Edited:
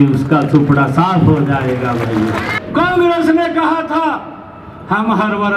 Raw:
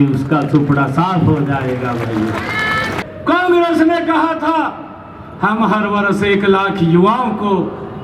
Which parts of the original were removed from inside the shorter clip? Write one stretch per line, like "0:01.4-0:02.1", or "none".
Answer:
0:02.6-0:03.1